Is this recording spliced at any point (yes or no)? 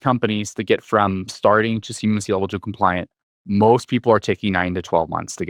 no